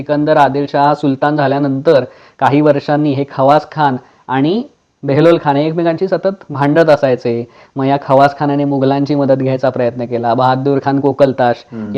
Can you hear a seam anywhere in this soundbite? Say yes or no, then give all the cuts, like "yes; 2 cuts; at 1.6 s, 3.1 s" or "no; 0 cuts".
no; 0 cuts